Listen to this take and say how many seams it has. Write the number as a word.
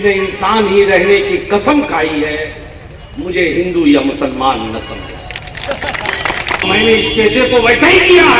one